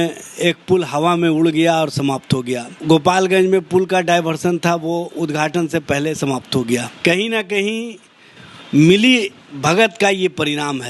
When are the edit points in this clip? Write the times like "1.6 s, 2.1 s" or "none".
2.7 s, 6.9 s